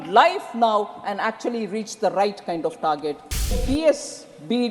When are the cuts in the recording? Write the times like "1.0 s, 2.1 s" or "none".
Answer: 3.6 s